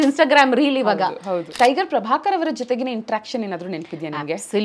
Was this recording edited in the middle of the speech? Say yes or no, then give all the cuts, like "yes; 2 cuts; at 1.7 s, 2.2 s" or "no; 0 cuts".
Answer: yes; 1 cut; at 1.5 s